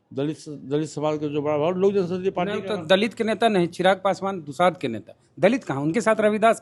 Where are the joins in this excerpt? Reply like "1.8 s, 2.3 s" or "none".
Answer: none